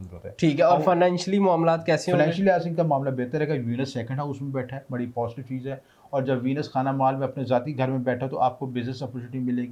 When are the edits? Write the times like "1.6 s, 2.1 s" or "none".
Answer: none

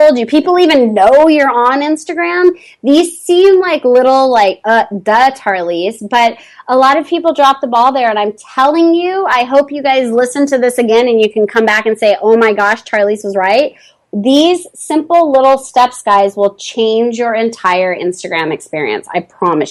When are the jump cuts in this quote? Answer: none

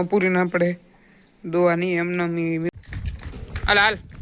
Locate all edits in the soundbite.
2.7 s

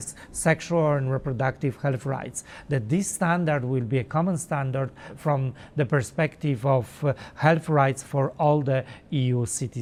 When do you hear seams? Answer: none

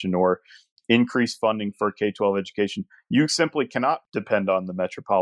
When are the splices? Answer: 4.0 s

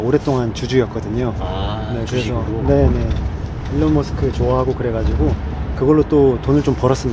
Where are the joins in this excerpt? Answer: none

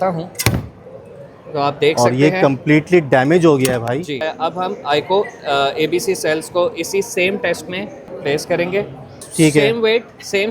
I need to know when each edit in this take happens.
4.3 s, 8.1 s, 9.2 s

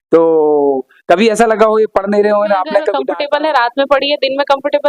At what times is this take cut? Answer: 3.0 s

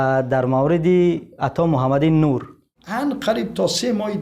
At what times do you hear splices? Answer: 2.8 s

